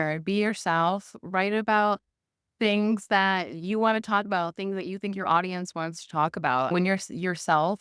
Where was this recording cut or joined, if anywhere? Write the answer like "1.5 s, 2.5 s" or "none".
6.7 s